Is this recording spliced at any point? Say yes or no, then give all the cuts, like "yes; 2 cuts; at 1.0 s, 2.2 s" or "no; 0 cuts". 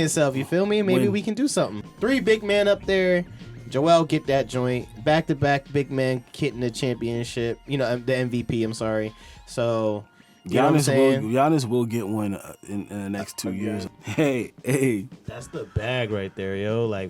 yes; 2 cuts; at 1.8 s, 13.9 s